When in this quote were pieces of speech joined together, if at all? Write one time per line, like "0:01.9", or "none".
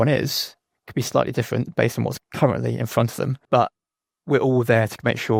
none